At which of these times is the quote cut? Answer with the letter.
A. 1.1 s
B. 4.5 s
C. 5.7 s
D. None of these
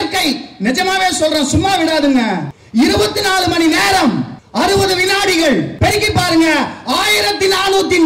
C